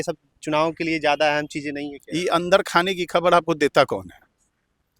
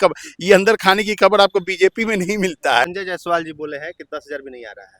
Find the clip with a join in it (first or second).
second